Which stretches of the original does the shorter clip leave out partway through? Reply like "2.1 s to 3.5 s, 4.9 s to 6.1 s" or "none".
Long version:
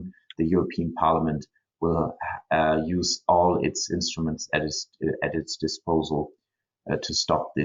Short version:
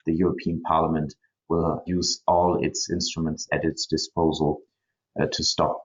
2.2 s to 2.9 s, 4.5 s to 5.2 s